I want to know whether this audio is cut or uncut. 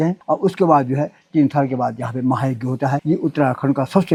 uncut